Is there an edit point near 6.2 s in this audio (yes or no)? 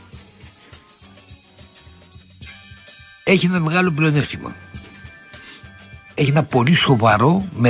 yes